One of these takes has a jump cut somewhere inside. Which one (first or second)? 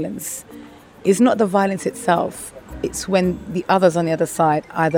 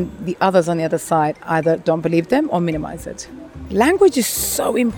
second